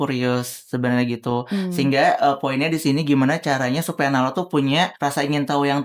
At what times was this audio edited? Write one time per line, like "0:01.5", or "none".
0:04.9